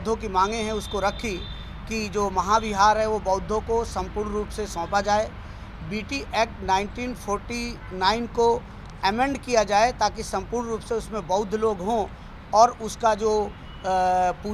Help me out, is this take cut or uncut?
uncut